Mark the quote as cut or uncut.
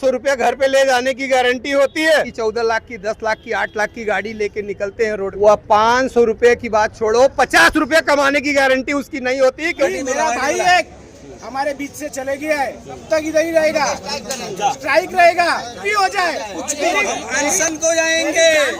cut